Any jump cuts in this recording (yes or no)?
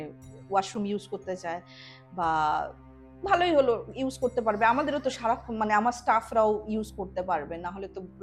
no